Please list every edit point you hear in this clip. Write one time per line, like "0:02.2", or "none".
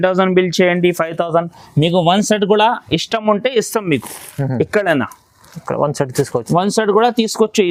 none